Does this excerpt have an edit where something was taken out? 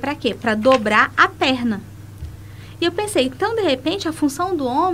no; 0 cuts

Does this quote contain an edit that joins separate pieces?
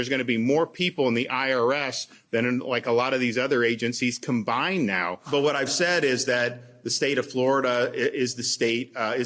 yes; 1 cut; at 5.2 s

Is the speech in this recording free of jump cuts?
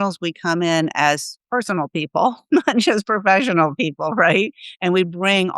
no; 1 cut; at 1.3 s

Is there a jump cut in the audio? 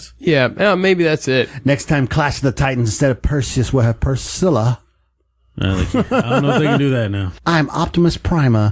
yes; 1 cut; at 7.3 s

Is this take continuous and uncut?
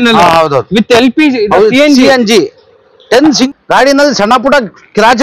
no; 1 cut; at 3.5 s

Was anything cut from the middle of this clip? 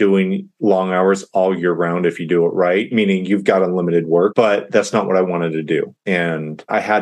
yes; 2 cuts; at 2.9 s, 4.3 s

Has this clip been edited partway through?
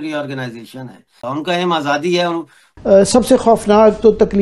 yes; 2 cuts; at 1.2 s, 2.7 s

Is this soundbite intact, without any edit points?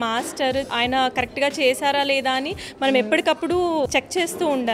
yes; 0 cuts

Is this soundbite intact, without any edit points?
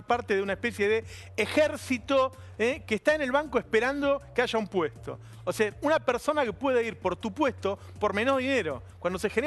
no; 1 cut; at 8.0 s

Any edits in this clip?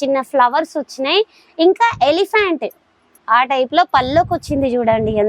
no; 0 cuts

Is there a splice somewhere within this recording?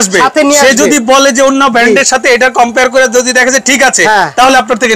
no; 0 cuts

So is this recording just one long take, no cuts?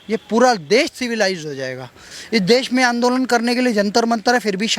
no; 1 cut; at 2.0 s

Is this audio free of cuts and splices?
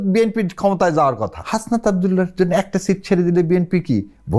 no; 1 cut; at 1.4 s

